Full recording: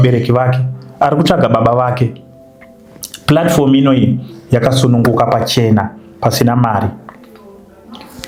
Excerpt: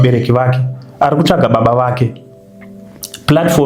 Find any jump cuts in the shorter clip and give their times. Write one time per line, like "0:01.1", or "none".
none